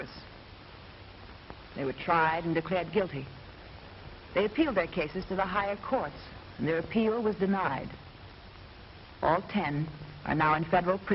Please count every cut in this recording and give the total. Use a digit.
1